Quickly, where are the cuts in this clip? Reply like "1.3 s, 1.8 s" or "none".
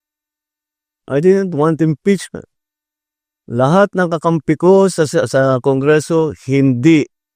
none